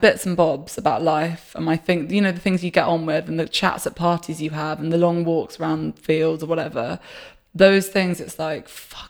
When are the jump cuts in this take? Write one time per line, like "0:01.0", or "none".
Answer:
none